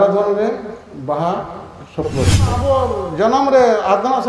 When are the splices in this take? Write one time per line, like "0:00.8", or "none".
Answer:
0:02.5